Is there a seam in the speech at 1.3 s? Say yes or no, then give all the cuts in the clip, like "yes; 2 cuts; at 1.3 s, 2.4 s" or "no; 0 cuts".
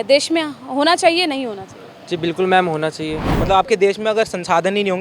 no; 1 cut; at 3.4 s